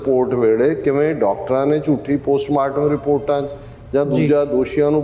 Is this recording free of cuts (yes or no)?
yes